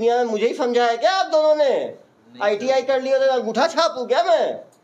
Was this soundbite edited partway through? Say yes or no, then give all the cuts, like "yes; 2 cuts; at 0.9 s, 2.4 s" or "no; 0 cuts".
no; 0 cuts